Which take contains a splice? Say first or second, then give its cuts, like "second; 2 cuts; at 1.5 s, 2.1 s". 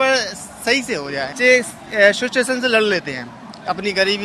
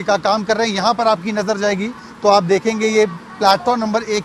first; 1 cut; at 1.3 s